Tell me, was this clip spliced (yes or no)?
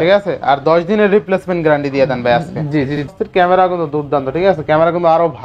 yes